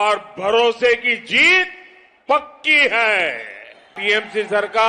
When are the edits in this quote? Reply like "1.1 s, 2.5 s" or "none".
4.0 s